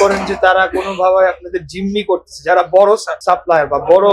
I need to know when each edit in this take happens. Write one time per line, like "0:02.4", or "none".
0:03.1